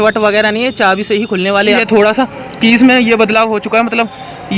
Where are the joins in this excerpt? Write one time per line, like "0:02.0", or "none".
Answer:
0:01.8